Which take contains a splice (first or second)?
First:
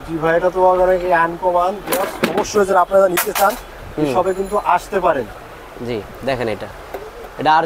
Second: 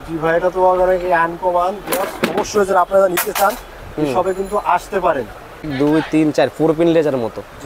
second